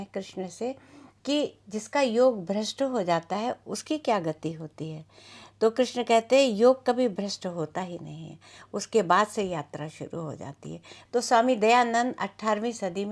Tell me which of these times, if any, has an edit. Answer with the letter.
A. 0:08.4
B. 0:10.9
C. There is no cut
B